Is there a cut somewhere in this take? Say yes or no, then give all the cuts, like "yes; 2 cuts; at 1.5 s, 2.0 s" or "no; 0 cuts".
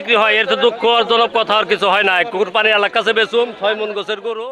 no; 0 cuts